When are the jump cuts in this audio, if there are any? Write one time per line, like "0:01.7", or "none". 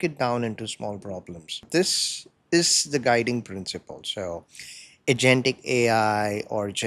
0:01.7